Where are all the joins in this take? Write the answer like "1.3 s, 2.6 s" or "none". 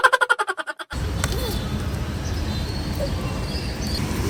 none

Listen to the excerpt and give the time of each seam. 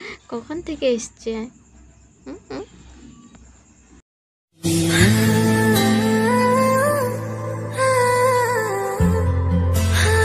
none

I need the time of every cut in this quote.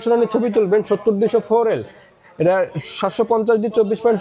none

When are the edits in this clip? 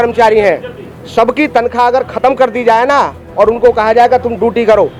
none

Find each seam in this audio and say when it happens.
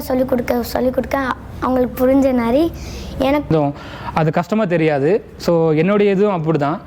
3.5 s

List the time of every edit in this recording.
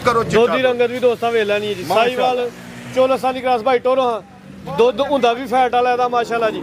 none

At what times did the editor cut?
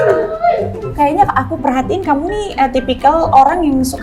0.9 s

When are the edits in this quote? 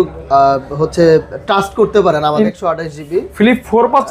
2.5 s

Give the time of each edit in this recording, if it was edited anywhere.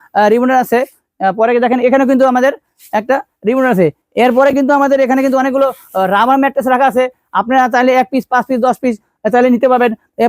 none

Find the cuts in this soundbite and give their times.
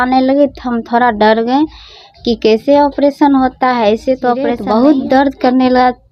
4.6 s

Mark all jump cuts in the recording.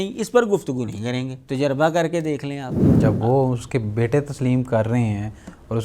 1.4 s, 2.8 s

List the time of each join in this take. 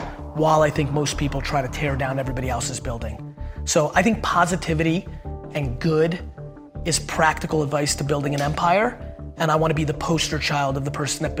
none

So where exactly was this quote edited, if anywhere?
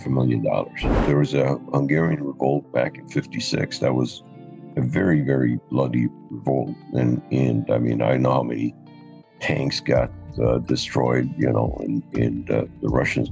1.0 s

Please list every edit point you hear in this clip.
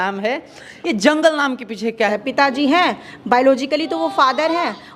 2.1 s

